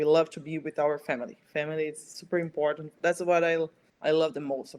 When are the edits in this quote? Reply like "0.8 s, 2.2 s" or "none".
3.8 s